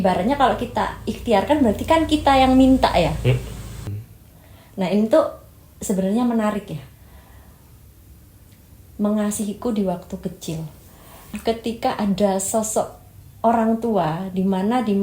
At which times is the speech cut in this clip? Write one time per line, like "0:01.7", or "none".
0:03.9
0:11.4